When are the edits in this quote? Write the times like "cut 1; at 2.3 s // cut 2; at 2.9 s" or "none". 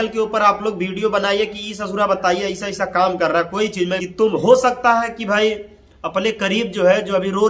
cut 1; at 4.0 s